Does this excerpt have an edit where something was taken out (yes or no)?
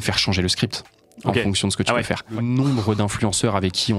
yes